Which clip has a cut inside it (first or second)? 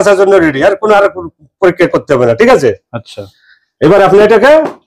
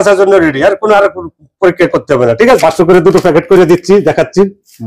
second